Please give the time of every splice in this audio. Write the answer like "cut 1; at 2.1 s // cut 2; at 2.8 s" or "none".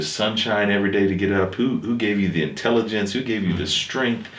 none